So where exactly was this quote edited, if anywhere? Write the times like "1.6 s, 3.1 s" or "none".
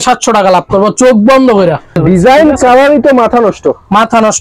2.0 s